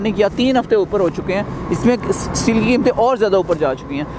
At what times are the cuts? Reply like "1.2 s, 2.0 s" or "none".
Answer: none

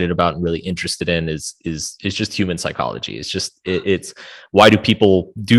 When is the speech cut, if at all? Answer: none

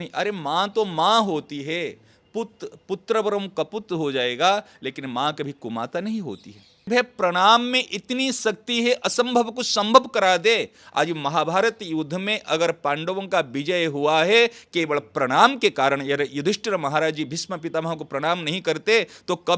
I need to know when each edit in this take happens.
6.9 s

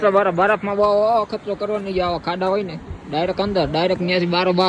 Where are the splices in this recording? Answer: none

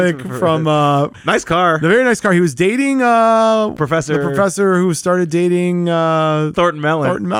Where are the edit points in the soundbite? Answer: 1.1 s, 3.7 s, 6.5 s

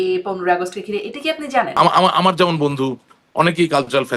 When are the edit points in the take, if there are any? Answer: 1.7 s

